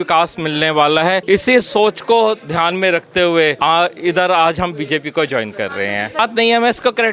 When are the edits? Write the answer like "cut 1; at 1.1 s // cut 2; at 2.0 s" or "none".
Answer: cut 1; at 1.2 s // cut 2; at 3.6 s // cut 3; at 6.2 s